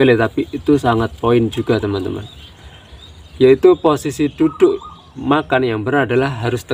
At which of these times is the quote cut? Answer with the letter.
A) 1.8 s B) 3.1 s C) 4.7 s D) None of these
D